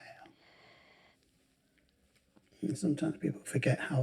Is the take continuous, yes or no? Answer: no